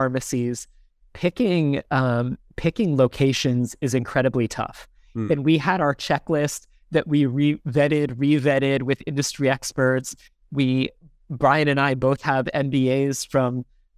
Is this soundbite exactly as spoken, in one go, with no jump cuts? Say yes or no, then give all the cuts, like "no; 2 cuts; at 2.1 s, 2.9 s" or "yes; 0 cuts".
yes; 0 cuts